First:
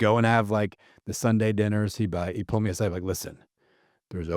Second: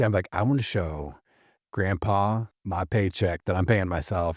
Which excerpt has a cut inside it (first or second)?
second